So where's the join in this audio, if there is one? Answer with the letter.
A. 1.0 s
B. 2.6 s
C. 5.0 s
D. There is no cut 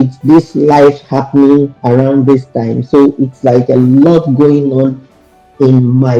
D